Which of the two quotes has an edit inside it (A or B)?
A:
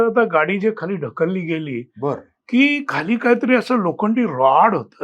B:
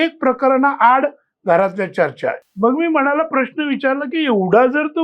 B